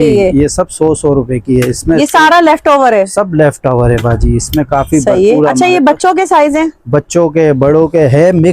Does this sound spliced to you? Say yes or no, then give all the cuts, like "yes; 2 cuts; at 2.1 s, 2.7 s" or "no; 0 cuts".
no; 0 cuts